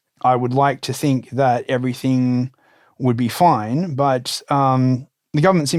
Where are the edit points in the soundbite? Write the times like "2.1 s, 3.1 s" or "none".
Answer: none